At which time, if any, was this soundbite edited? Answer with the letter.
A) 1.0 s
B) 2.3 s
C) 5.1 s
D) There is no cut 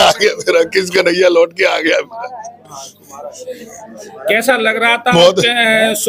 D